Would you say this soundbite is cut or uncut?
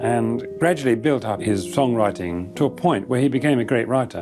cut